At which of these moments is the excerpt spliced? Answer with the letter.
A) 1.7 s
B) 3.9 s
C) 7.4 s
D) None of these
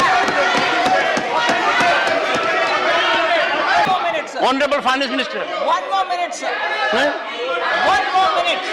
B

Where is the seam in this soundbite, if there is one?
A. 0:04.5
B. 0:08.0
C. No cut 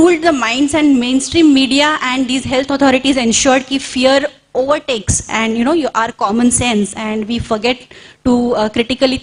C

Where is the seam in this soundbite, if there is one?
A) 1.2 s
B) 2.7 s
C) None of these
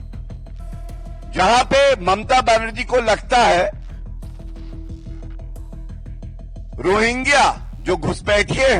A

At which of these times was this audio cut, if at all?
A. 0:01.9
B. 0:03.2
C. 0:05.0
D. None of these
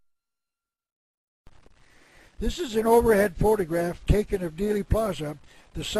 D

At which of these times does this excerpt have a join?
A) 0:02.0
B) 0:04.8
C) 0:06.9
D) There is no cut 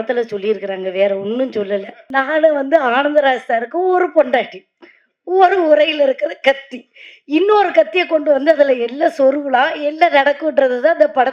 A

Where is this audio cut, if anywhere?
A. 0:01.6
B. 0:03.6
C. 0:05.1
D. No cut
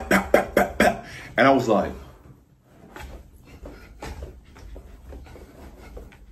D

